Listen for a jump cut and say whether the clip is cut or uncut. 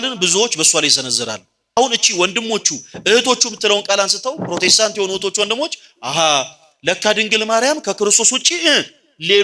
cut